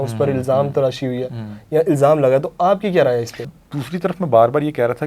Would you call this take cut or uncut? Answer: cut